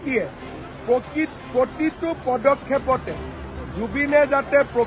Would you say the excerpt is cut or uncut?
uncut